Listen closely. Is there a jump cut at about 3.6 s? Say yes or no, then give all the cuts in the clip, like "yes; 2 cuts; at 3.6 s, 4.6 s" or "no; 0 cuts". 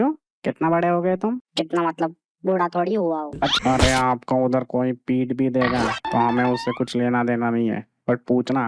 yes; 1 cut; at 3.6 s